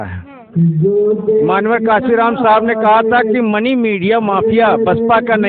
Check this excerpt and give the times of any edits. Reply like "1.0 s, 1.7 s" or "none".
none